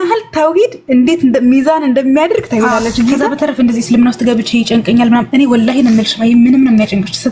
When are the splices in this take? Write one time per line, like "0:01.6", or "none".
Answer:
0:03.3